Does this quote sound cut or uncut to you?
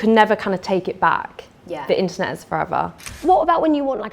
cut